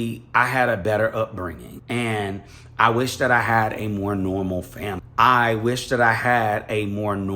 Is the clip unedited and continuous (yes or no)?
no